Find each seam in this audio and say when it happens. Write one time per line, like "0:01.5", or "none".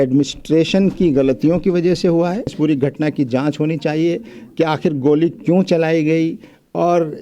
0:02.5